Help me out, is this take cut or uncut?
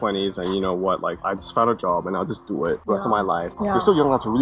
cut